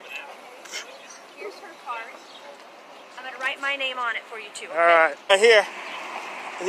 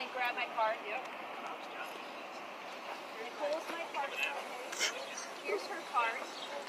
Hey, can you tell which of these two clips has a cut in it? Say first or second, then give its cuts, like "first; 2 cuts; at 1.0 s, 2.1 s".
first; 1 cut; at 5.3 s